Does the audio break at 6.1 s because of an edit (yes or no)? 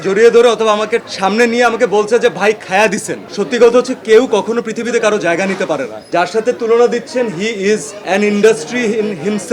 yes